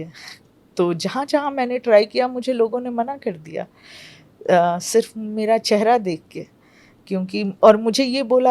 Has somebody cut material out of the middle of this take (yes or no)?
no